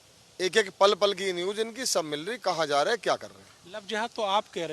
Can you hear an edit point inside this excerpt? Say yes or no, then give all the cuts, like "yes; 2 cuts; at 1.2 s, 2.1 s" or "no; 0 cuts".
no; 0 cuts